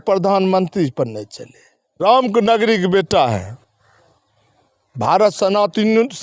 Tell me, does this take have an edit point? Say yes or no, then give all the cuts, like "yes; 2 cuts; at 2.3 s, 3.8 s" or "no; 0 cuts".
yes; 1 cut; at 2.0 s